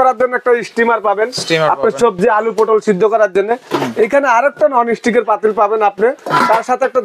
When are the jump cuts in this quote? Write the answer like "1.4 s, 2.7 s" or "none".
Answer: none